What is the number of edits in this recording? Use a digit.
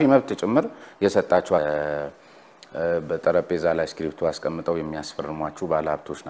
1